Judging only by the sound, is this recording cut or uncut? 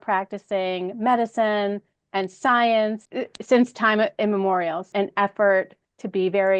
cut